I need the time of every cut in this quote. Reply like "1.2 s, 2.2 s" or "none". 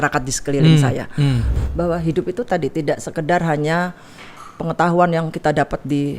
1.5 s